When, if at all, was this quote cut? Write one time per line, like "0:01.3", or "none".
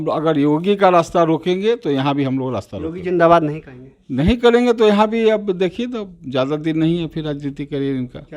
none